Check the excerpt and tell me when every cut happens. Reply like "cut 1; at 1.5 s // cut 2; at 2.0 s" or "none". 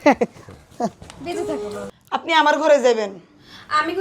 cut 1; at 1.9 s